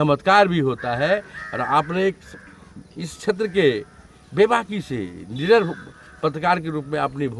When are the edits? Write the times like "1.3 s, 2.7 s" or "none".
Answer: none